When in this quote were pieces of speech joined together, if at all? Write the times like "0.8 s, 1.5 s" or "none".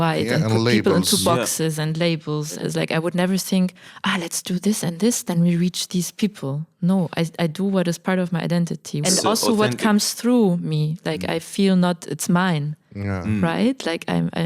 2.6 s, 9.0 s